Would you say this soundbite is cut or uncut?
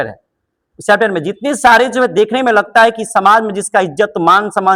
uncut